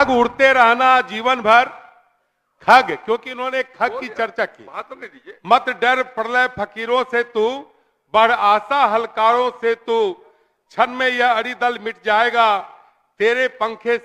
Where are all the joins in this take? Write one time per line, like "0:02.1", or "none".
none